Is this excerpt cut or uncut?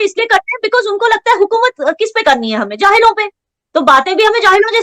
uncut